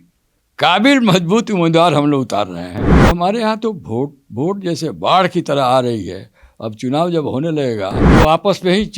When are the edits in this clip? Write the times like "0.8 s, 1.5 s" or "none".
2.8 s, 8.0 s